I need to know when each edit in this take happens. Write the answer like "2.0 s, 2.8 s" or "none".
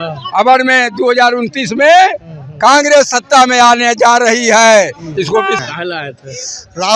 5.6 s